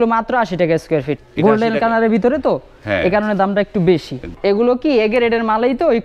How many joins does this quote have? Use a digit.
2